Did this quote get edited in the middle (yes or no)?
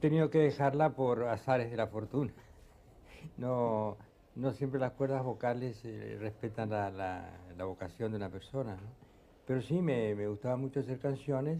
yes